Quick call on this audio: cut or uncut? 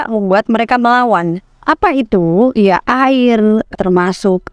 cut